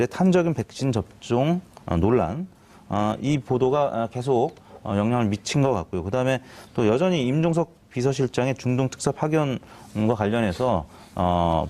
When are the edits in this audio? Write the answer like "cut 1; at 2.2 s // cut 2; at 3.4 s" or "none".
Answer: cut 1; at 10.6 s